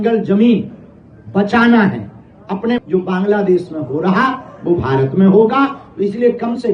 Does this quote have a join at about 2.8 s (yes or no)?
yes